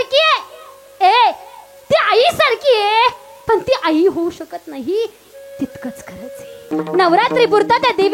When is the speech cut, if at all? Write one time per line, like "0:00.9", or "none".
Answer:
0:06.7